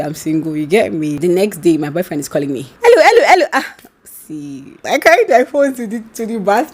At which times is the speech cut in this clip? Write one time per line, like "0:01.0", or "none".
0:01.2
0:02.6
0:04.8